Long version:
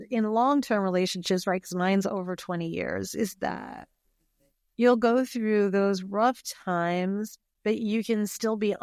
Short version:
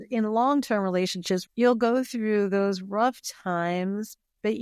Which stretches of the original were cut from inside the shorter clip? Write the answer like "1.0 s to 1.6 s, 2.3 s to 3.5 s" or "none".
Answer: 1.4 s to 4.6 s